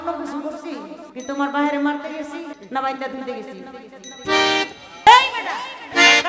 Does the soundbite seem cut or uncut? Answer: cut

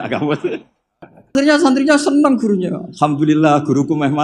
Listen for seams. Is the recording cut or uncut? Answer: cut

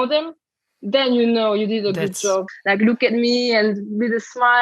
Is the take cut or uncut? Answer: cut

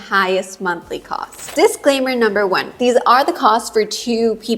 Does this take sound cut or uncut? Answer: cut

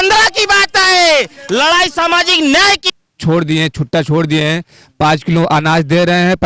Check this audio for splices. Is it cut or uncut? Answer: cut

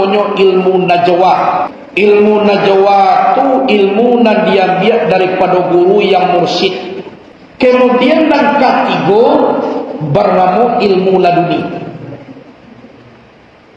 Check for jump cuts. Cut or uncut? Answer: cut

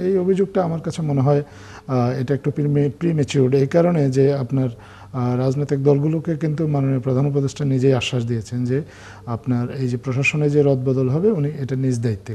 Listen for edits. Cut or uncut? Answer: uncut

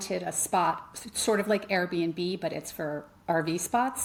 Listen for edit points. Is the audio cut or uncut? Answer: uncut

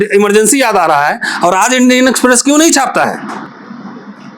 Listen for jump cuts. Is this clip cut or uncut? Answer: uncut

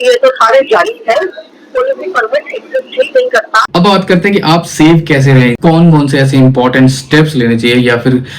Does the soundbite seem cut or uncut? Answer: cut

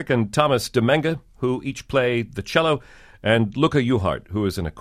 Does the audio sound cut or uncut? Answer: uncut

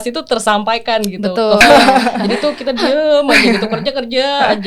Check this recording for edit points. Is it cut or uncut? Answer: cut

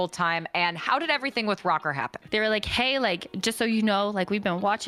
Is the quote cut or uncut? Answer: cut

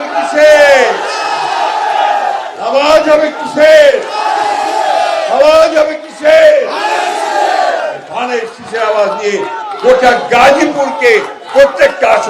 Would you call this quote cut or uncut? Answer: uncut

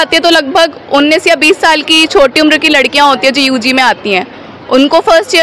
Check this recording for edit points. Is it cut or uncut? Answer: uncut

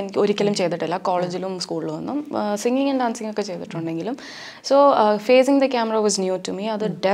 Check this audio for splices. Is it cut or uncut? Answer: uncut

